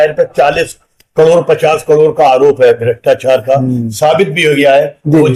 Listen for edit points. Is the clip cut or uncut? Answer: uncut